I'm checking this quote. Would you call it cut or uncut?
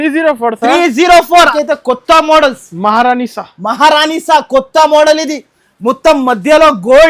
cut